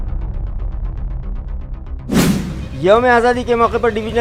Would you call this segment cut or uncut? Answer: uncut